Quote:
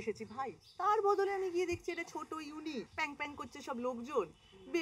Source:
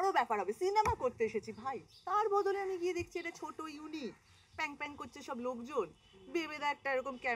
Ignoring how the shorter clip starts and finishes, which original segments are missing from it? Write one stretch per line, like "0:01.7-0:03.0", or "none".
0:04.2-0:04.5